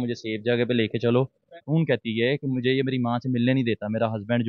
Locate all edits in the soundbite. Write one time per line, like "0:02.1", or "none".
0:01.6